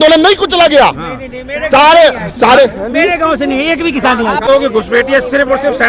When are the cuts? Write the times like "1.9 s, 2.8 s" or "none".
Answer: 4.5 s